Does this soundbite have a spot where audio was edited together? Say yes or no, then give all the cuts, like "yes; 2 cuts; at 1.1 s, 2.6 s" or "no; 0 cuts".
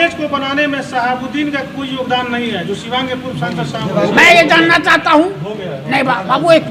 no; 0 cuts